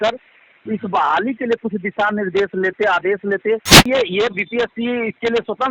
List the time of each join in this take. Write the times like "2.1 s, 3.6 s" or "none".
3.8 s